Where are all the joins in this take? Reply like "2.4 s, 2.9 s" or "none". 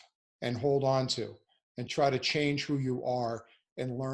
1.8 s